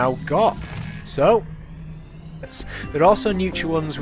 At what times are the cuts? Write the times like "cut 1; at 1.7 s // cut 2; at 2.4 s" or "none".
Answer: none